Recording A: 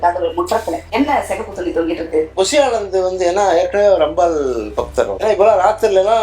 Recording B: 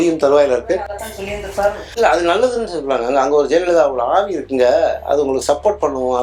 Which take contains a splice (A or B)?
A